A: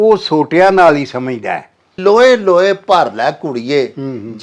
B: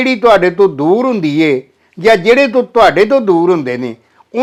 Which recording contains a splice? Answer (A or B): A